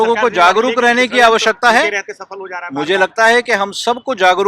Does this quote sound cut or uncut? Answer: uncut